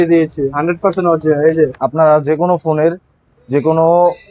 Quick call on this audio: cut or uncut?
cut